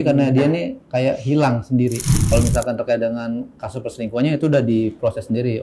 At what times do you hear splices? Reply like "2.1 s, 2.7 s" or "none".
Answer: 2.2 s